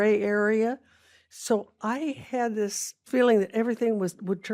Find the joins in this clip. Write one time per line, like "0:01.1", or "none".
none